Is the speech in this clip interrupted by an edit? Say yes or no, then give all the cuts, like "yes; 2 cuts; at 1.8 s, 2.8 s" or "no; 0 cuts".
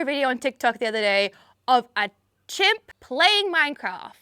yes; 1 cut; at 3.0 s